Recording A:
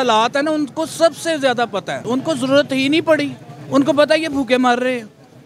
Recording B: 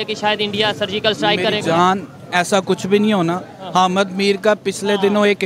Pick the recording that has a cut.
A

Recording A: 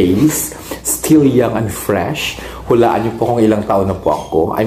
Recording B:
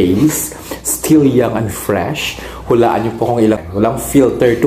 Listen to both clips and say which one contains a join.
B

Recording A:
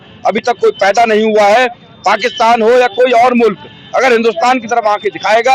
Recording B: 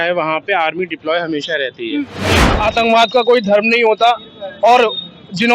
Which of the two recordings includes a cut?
B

